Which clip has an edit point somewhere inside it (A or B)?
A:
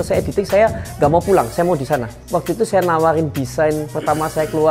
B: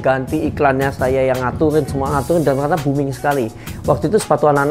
A